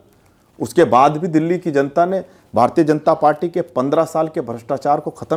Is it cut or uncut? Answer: uncut